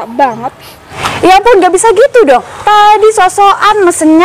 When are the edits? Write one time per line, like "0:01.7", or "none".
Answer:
0:01.0